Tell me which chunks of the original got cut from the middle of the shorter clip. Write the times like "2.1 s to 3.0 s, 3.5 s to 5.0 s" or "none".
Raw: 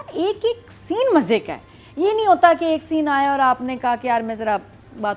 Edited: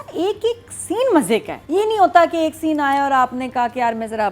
1.6 s to 1.8 s